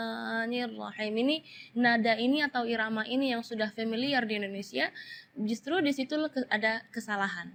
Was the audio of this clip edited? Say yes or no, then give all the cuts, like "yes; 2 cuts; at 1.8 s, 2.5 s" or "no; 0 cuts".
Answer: no; 0 cuts